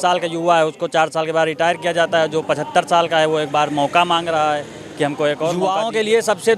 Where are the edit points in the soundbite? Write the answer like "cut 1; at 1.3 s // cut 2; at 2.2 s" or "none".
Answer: cut 1; at 5.6 s

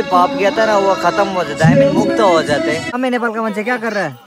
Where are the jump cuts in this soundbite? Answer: cut 1; at 2.9 s

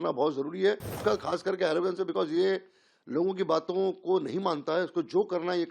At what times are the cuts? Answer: cut 1; at 1.0 s

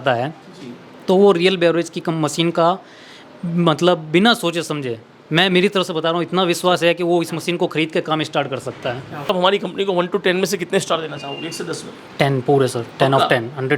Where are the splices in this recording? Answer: cut 1; at 9.3 s

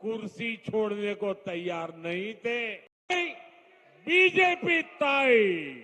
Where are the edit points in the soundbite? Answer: cut 1; at 2.9 s

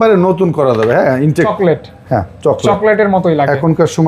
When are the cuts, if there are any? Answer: cut 1; at 1.5 s

